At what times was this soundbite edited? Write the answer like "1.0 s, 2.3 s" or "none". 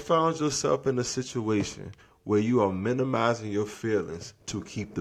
none